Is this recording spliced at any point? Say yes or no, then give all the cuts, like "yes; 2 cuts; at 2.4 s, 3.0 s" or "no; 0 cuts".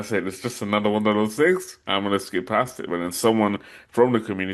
no; 0 cuts